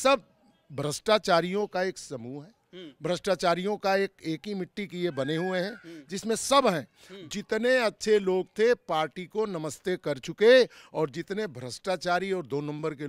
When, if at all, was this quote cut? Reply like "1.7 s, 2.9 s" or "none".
none